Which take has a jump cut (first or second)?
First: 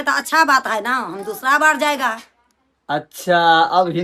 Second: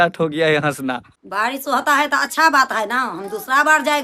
second